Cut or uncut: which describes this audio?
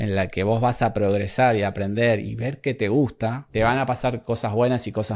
cut